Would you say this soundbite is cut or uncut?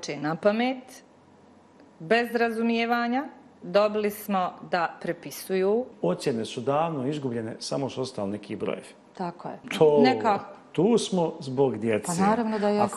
cut